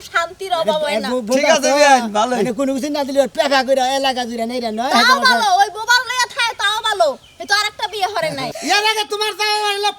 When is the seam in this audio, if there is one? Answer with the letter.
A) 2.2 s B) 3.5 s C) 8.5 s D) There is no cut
C